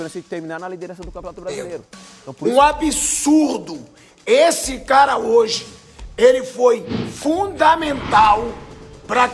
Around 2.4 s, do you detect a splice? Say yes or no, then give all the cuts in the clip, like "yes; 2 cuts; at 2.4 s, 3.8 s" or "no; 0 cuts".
yes; 1 cut; at 2.4 s